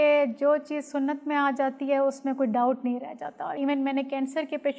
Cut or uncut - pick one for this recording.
cut